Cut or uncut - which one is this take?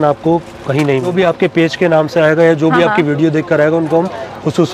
cut